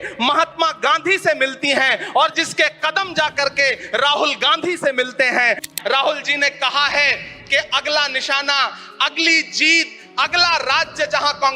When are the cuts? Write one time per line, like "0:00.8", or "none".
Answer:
0:05.7